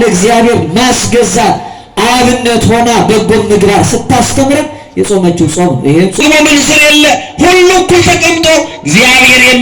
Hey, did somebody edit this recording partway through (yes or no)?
yes